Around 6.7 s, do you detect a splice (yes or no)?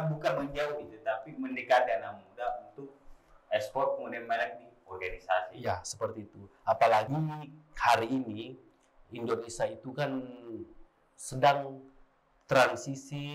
no